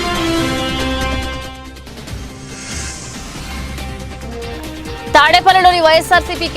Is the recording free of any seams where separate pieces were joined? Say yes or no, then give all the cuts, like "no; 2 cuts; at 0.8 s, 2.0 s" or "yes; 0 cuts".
yes; 0 cuts